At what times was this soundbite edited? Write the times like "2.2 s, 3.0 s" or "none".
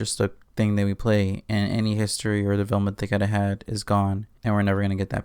4.3 s